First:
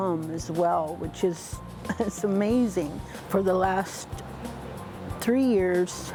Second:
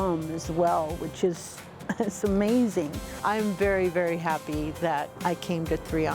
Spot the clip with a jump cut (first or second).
second